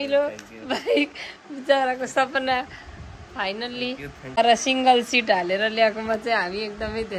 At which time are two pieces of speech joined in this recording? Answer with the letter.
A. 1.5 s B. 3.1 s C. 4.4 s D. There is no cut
C